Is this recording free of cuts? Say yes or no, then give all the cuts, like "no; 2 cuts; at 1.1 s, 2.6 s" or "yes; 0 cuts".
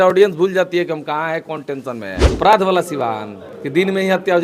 no; 1 cut; at 2.3 s